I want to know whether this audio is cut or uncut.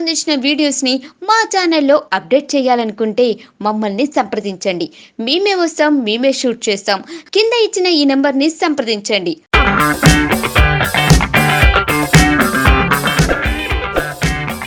uncut